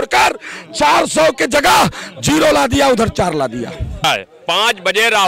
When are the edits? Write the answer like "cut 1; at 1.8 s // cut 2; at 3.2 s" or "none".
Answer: cut 1; at 4.0 s